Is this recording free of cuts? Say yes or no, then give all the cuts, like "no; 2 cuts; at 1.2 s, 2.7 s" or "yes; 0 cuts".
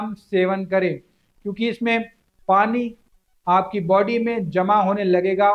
yes; 0 cuts